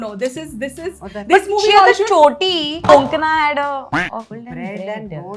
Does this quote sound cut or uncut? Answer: cut